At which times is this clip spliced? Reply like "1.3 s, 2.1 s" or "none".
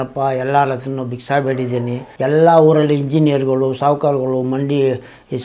2.0 s